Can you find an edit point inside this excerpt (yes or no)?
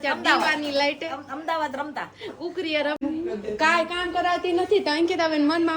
yes